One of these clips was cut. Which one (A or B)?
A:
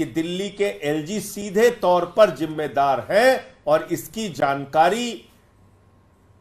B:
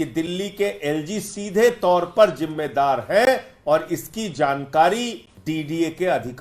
B